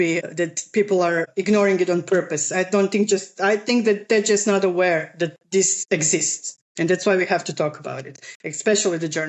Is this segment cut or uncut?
uncut